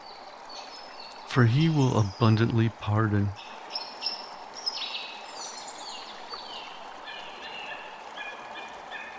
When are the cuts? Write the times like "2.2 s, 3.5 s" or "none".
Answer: 1.3 s, 3.3 s